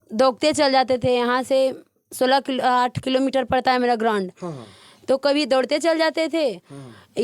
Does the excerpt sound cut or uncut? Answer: uncut